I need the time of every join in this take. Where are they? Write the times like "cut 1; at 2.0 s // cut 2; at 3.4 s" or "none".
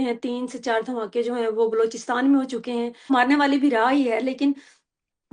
cut 1; at 3.1 s